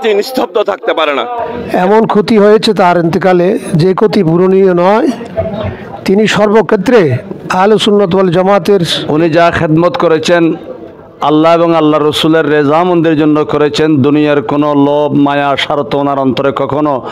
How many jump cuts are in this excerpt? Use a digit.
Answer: 2